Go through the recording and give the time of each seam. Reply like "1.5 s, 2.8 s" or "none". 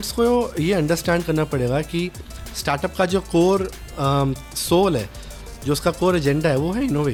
none